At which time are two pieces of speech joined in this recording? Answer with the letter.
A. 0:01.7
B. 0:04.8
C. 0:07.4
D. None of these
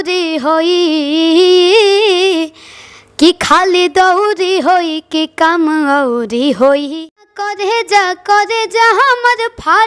C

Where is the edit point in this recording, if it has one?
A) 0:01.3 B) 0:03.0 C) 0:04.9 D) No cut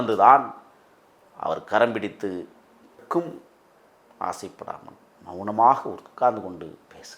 B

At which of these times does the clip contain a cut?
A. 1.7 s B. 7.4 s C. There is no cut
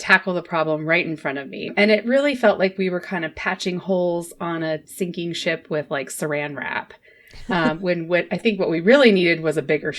A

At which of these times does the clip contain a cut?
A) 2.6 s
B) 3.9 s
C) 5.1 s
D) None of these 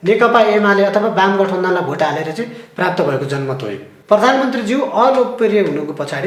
B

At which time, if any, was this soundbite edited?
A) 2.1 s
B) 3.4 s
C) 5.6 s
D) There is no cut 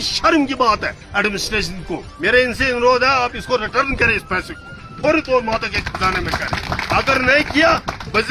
A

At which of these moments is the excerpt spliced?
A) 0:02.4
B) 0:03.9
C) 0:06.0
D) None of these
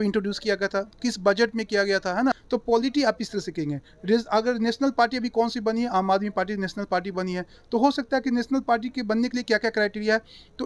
A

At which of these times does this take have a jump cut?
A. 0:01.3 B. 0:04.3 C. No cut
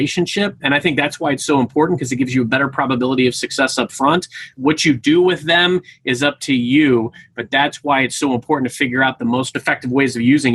C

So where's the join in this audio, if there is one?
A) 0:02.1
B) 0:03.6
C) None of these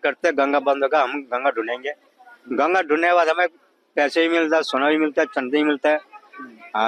C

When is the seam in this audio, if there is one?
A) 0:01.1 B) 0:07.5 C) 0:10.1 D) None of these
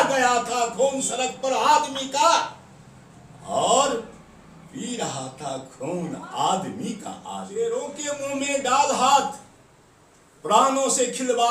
B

